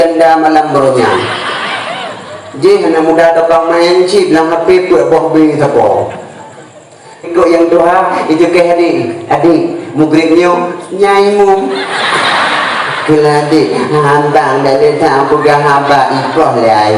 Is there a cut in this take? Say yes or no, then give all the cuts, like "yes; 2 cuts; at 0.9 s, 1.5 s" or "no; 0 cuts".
yes; 1 cut; at 7.3 s